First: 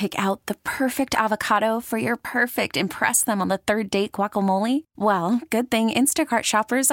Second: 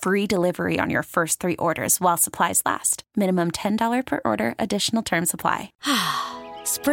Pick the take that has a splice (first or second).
second